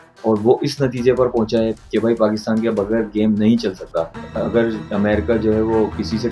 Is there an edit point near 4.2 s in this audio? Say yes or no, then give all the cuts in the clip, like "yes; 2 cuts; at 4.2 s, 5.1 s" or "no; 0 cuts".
yes; 1 cut; at 4.2 s